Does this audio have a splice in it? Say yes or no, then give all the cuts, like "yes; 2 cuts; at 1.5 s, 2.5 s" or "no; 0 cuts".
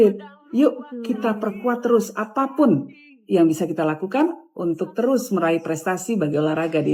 no; 0 cuts